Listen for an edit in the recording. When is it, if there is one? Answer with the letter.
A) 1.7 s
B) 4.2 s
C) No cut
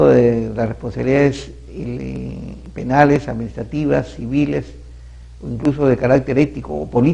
B